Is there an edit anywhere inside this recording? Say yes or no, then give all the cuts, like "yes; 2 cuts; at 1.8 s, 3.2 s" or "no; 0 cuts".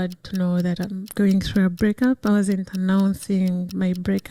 no; 0 cuts